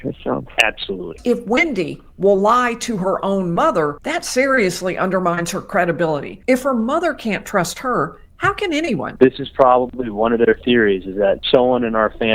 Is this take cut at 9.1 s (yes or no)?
yes